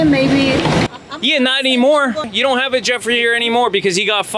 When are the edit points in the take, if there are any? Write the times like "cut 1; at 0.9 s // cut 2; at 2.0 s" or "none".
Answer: cut 1; at 2.3 s